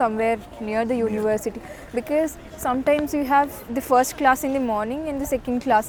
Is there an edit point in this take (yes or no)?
no